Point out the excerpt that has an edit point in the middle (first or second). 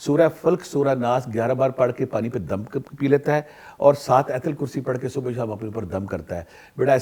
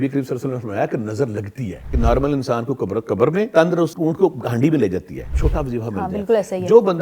second